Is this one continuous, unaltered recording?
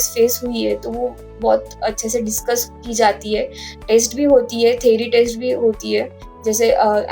yes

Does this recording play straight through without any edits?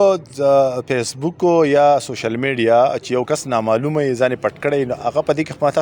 yes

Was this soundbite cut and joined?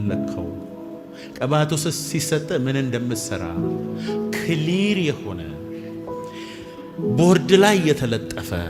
no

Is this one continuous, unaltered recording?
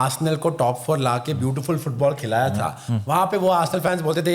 yes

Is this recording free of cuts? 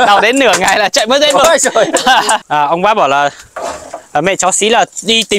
no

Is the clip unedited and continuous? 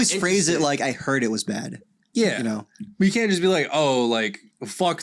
yes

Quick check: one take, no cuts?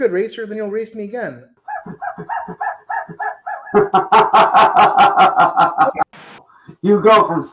no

